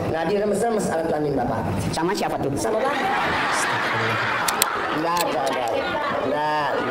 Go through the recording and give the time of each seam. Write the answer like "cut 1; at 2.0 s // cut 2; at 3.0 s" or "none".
cut 1; at 4.4 s